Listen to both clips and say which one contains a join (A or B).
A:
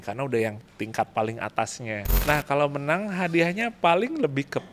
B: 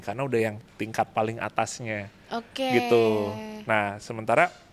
A